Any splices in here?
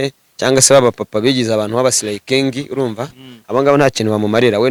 no; 0 cuts

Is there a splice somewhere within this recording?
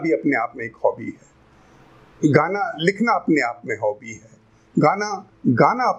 no; 0 cuts

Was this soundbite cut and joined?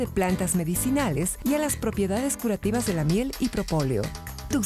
no; 0 cuts

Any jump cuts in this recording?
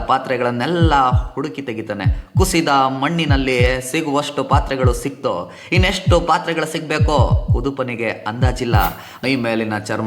yes; 1 cut; at 9.1 s

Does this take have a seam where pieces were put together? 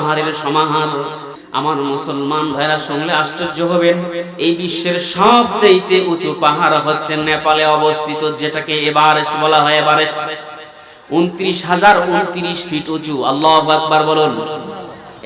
yes; 1 cut; at 1.3 s

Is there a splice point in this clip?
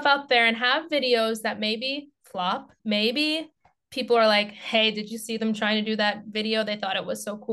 yes; 1 cut; at 2.8 s

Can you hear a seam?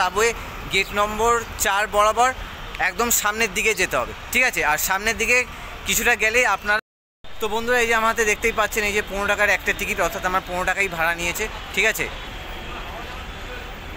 yes; 2 cuts; at 6.8 s, 12.3 s

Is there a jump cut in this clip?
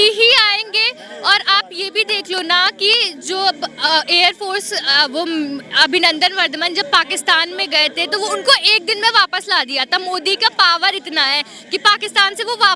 no; 0 cuts

